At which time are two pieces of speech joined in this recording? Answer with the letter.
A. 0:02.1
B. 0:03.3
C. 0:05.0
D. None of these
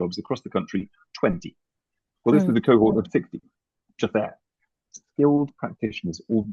C